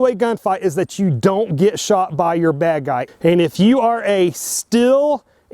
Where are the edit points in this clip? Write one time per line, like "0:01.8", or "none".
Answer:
0:03.0